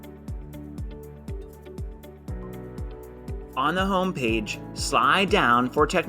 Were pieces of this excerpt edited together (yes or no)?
yes